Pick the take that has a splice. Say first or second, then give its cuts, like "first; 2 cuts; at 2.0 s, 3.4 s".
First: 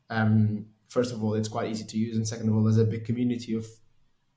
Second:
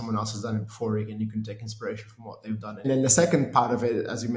second; 1 cut; at 2.8 s